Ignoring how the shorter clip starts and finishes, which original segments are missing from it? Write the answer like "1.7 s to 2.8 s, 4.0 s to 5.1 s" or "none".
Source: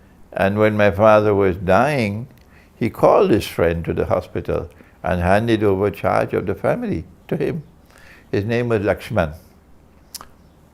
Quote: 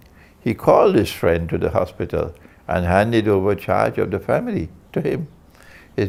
none